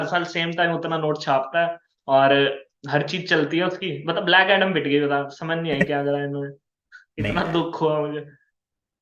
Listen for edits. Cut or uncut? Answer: uncut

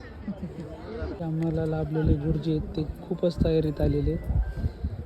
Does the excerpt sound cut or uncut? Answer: cut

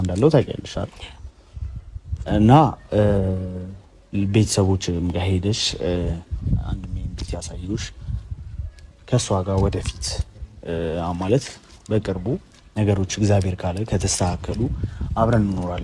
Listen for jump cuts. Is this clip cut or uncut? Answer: uncut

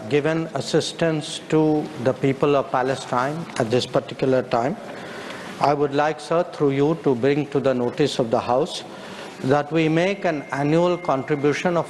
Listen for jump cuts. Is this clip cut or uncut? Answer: uncut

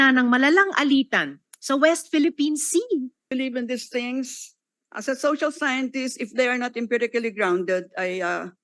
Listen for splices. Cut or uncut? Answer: cut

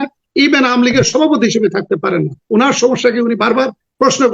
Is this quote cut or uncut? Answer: cut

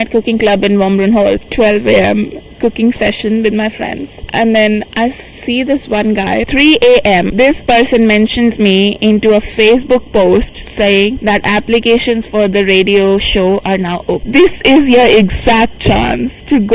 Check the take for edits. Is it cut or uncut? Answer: cut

